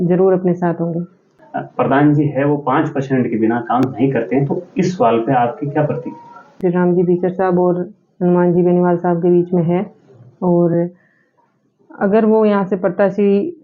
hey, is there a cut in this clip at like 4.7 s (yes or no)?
no